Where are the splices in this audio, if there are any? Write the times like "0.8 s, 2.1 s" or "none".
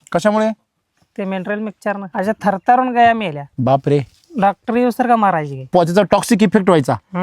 2.1 s, 3.4 s, 5.7 s

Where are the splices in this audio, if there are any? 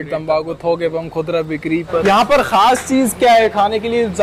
2.0 s

